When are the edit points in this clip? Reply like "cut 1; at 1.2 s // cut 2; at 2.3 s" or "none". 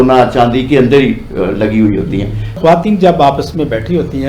cut 1; at 2.6 s